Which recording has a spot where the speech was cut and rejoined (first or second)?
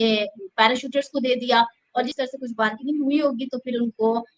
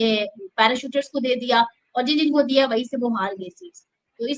first